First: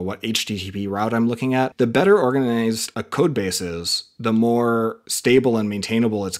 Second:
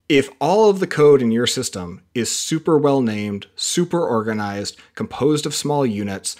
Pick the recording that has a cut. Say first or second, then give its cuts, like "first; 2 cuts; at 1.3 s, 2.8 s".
first; 3 cuts; at 1.7 s, 2.9 s, 5.0 s